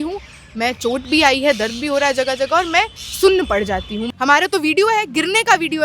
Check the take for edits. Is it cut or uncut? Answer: cut